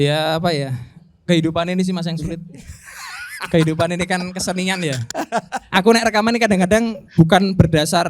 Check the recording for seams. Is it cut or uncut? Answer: cut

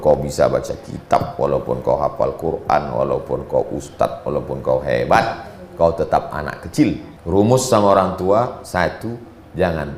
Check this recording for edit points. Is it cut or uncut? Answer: cut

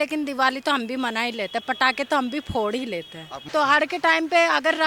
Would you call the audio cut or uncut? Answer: cut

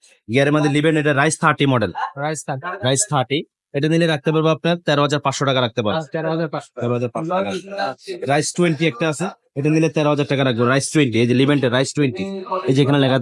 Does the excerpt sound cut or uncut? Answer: uncut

